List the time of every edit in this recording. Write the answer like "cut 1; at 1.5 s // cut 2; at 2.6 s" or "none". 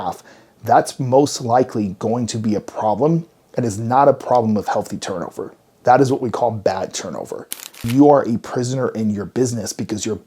cut 1; at 7.8 s